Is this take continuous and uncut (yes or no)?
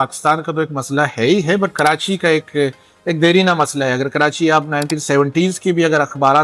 yes